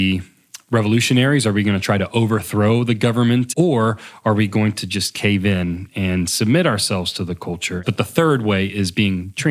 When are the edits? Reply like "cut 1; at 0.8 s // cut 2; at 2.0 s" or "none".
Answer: cut 1; at 3.5 s // cut 2; at 7.8 s